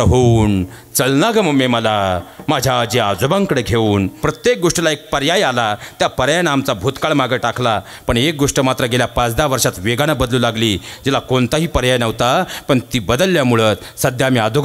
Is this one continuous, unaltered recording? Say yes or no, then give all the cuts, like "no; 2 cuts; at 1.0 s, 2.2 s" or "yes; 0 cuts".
no; 1 cut; at 4.2 s